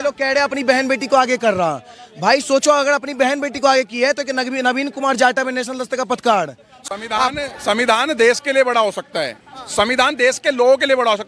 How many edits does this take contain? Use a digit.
1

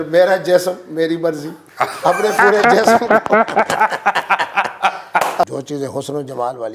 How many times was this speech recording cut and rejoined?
1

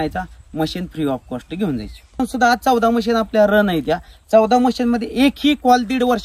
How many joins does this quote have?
1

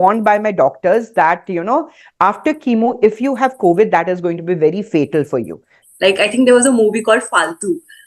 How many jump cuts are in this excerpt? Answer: 1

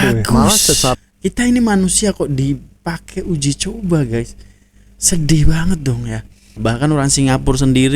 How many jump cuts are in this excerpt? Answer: 2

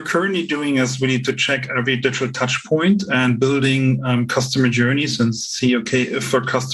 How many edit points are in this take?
0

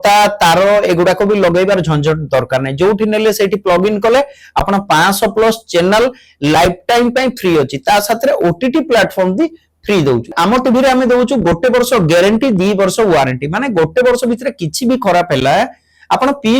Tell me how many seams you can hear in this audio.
1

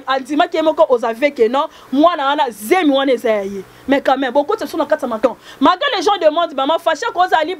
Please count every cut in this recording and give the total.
1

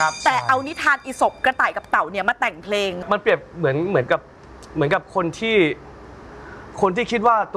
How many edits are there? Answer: 1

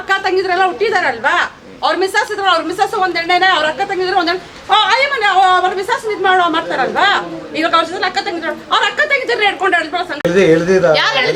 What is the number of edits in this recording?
0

